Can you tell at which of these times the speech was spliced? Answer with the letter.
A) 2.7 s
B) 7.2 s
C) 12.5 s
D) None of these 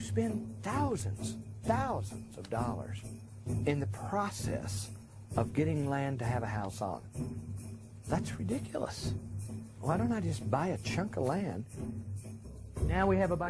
D